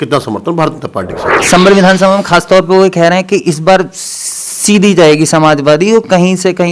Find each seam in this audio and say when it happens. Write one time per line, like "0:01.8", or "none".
0:01.3